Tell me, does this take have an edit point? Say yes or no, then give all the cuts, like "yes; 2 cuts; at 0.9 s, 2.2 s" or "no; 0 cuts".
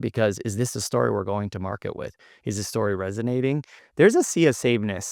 yes; 1 cut; at 3.8 s